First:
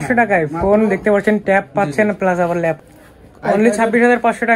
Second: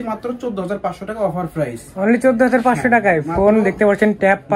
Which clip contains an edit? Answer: first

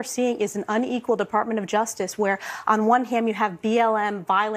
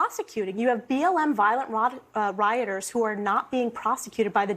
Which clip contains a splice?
second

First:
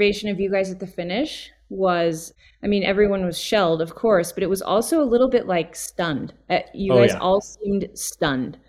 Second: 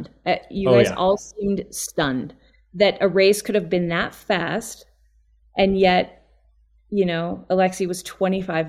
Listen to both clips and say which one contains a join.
first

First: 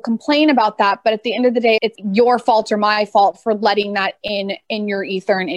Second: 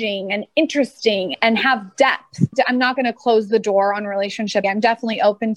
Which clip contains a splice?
second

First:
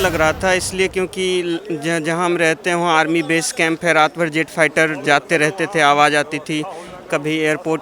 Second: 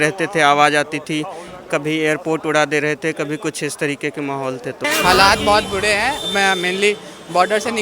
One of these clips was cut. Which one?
second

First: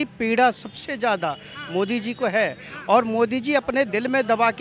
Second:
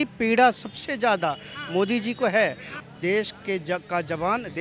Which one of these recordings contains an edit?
second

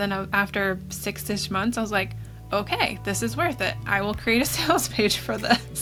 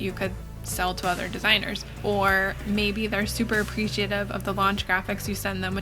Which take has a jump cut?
second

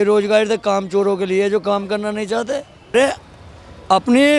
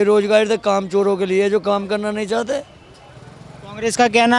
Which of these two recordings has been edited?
first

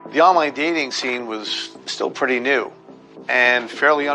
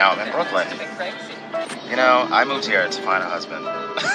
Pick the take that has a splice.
second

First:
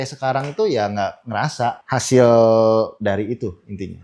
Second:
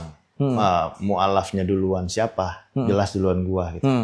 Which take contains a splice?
first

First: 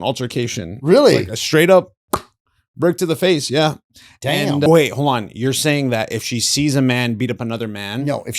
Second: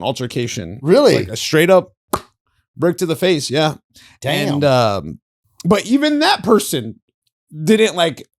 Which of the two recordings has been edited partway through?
first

